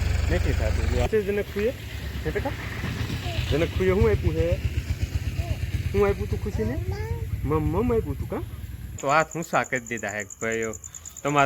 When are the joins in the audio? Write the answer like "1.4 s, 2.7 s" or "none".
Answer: 1.1 s, 9.0 s

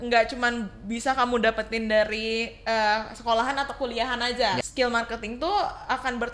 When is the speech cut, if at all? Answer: 4.7 s

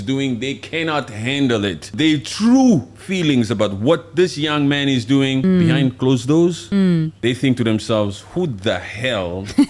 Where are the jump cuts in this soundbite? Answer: 1.9 s, 5.4 s, 6.9 s

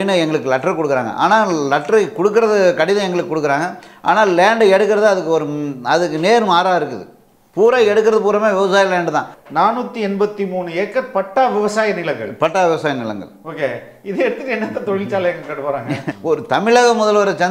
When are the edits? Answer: 9.3 s, 16.1 s

